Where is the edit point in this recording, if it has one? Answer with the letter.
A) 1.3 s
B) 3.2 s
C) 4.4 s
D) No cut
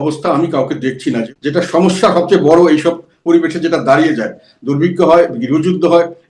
A